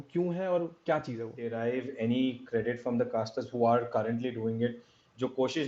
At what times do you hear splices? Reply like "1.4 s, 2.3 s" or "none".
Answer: 1.4 s